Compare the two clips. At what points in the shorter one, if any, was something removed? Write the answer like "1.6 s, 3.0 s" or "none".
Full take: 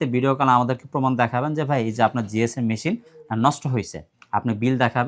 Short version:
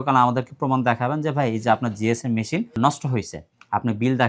2.7 s